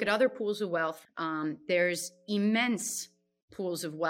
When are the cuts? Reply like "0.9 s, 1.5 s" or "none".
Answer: 1.0 s